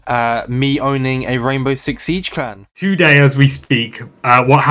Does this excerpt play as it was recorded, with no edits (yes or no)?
no